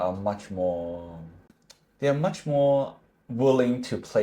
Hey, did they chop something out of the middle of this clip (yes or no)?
no